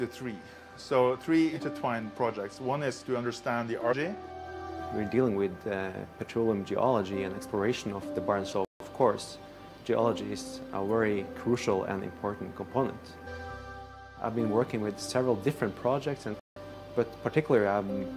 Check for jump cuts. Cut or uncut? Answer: cut